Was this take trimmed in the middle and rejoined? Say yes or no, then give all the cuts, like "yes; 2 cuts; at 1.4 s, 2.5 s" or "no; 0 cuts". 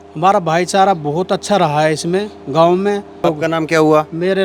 yes; 1 cut; at 3.2 s